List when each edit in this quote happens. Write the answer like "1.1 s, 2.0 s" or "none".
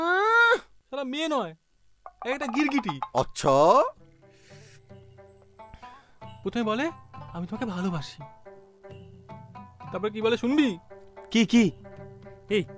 none